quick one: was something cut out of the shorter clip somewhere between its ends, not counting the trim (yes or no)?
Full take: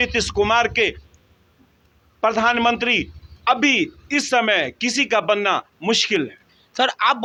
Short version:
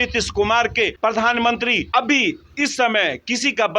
yes